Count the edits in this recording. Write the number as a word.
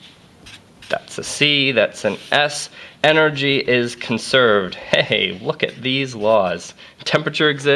one